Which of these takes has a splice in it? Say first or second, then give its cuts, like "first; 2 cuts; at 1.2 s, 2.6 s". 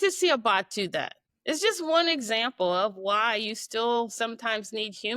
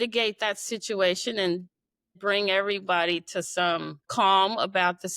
second; 1 cut; at 4.1 s